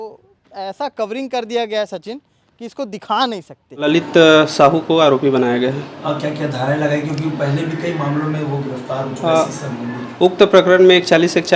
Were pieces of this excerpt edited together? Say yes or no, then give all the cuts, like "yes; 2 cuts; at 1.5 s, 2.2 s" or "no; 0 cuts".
yes; 1 cut; at 3.9 s